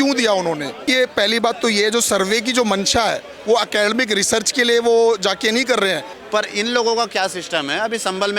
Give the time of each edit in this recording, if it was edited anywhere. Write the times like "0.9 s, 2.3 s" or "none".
0.8 s, 6.1 s